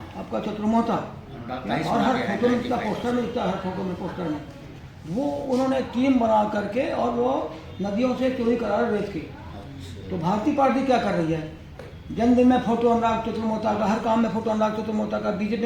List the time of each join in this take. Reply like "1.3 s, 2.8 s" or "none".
none